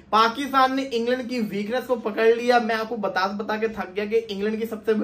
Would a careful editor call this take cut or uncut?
uncut